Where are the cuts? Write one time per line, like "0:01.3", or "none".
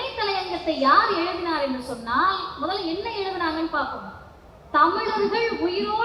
none